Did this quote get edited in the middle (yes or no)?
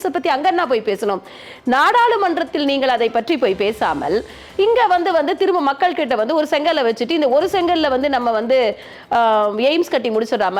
no